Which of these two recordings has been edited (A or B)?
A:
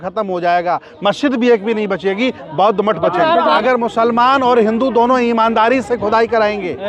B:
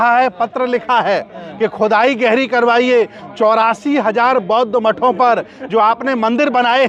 A